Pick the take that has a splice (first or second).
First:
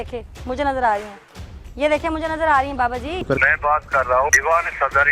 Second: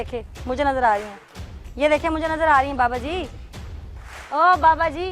first